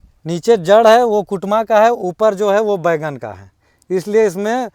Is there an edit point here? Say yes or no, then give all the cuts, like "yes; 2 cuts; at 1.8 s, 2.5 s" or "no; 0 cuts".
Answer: no; 0 cuts